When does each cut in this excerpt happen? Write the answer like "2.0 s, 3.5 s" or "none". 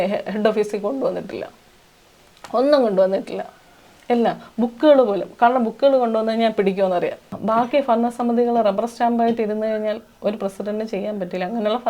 7.3 s